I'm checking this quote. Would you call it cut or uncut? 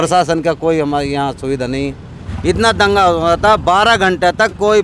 cut